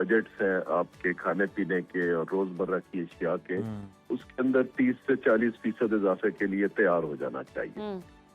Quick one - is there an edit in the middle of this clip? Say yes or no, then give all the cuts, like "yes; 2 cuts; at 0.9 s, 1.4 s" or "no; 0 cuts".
no; 0 cuts